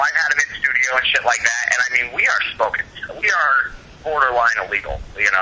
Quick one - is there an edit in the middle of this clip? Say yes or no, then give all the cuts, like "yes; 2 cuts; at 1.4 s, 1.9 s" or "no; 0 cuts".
no; 0 cuts